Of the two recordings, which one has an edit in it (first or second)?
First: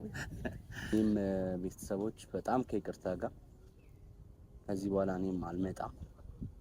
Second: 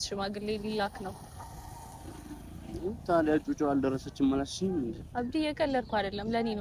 first